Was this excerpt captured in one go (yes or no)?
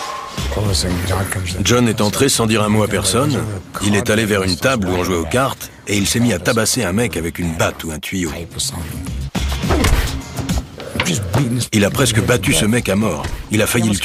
yes